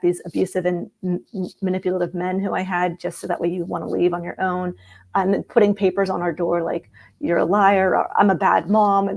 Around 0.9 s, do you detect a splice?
no; 0 cuts

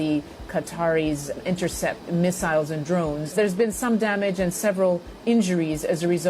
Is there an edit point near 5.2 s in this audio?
no; 2 cuts; at 1.7 s, 3.3 s

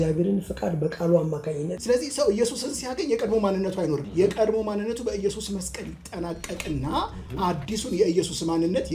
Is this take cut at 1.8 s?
yes; 2 cuts; at 1.8 s, 4.0 s

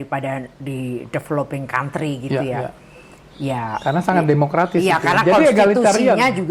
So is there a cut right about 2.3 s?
no; 0 cuts

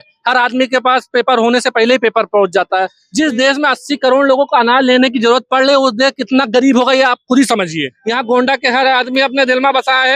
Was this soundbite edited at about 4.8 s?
no; 2 cuts; at 3.0 s, 7.9 s

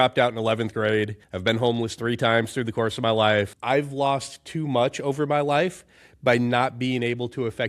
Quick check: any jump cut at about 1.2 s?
yes; 2 cuts; at 1.2 s, 3.5 s

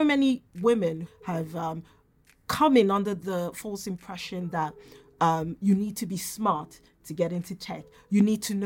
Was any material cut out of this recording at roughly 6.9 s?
no; 1 cut; at 1.0 s

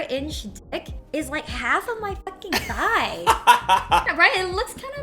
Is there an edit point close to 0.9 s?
no; 1 cut; at 4.1 s

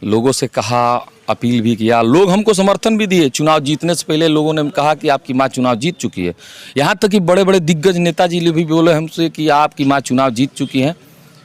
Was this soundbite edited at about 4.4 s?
no; 0 cuts

